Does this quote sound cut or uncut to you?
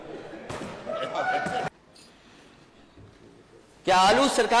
cut